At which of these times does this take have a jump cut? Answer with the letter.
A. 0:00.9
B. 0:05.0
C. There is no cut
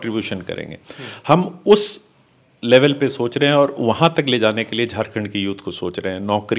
C